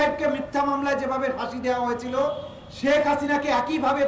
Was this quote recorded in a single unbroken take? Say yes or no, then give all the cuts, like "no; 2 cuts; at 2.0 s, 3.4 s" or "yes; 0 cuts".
yes; 0 cuts